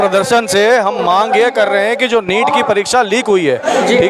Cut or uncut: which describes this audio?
uncut